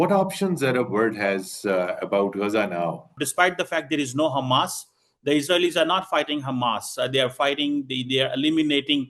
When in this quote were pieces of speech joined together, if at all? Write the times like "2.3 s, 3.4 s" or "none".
3.2 s